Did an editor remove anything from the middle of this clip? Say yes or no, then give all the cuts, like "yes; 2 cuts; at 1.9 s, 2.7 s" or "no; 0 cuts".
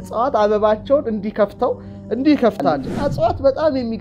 yes; 1 cut; at 2.9 s